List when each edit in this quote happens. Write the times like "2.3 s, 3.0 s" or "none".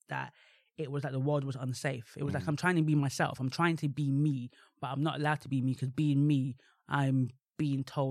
none